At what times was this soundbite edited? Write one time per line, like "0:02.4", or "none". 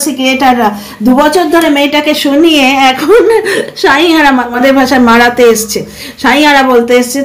0:04.5